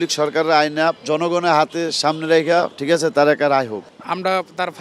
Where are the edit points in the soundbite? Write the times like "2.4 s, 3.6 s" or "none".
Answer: 1.0 s, 3.8 s